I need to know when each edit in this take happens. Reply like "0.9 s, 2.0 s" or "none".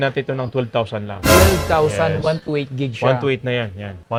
none